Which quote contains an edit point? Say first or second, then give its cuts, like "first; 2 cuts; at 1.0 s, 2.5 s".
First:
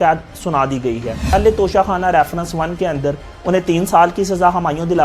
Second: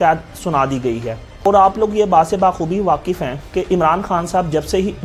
first; 1 cut; at 1.3 s